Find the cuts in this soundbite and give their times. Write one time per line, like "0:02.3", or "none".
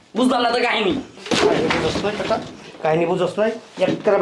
0:01.1